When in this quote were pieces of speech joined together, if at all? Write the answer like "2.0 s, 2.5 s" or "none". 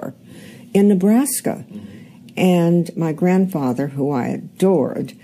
1.0 s